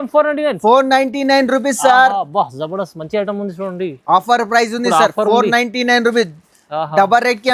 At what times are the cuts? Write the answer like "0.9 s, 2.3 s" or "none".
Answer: none